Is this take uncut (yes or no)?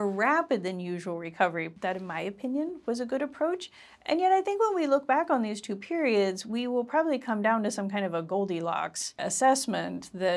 no